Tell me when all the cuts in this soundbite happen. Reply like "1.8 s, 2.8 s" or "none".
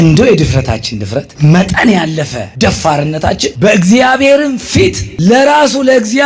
1.3 s, 2.4 s, 3.5 s, 5.1 s